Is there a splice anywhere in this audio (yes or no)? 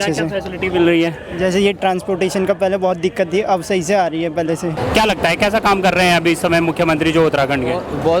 yes